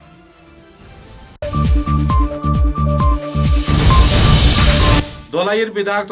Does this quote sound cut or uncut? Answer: uncut